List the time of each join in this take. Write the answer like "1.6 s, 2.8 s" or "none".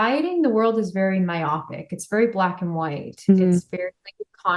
none

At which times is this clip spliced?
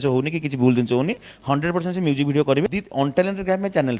2.6 s

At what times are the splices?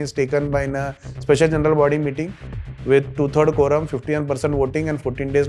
none

